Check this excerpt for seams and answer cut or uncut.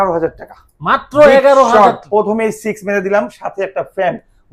uncut